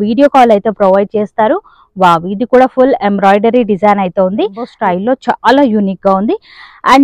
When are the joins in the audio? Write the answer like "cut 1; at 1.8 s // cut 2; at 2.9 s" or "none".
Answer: cut 1; at 4.7 s